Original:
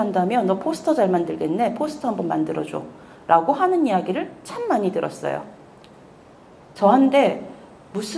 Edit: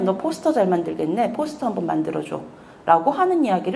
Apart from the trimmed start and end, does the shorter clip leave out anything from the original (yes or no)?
no